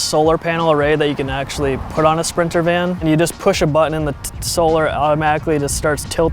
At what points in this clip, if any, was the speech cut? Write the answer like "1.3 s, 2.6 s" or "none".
3.0 s